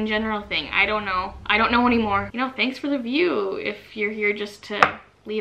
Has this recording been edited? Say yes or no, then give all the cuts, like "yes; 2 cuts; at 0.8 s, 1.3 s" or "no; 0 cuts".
yes; 1 cut; at 2.3 s